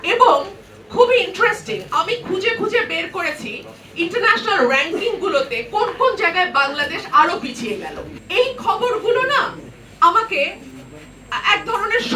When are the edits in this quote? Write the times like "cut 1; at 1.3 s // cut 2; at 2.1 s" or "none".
cut 1; at 8.1 s